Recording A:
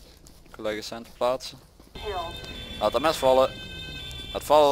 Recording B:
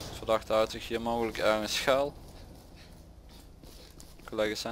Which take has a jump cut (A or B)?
A